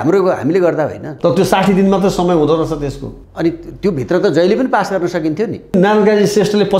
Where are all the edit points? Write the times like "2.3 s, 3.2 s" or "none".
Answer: 1.1 s, 5.7 s